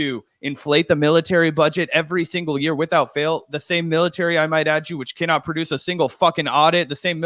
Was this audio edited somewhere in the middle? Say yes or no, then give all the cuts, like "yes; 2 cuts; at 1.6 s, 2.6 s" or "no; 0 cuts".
no; 0 cuts